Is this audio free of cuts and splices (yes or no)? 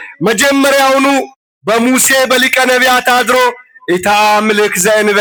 yes